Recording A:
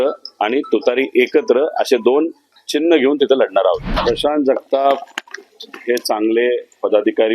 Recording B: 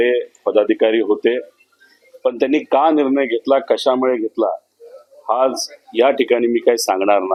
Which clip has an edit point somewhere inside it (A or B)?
A